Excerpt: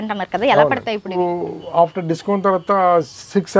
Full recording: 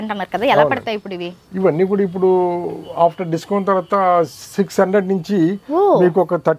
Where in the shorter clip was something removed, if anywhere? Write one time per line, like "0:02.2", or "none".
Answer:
0:01.2